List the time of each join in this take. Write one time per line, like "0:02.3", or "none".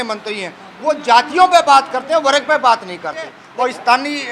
0:03.4